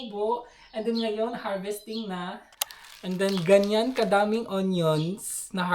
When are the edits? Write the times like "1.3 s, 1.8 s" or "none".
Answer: 2.5 s